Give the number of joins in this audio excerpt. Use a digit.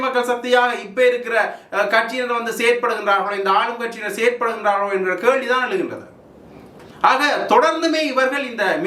0